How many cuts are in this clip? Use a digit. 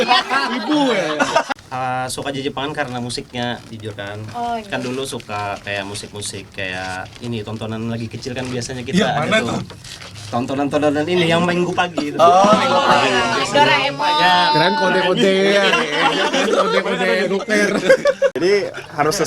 2